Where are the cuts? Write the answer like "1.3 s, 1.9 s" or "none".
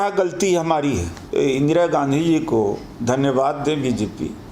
1.2 s